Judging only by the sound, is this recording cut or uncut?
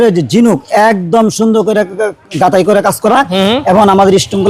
uncut